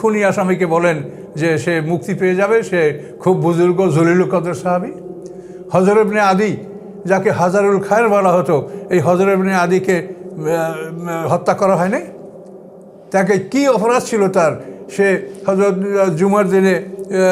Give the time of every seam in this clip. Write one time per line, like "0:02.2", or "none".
none